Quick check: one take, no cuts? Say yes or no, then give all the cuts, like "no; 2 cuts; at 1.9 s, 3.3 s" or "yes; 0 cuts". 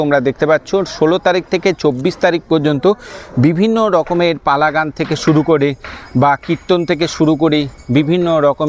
yes; 0 cuts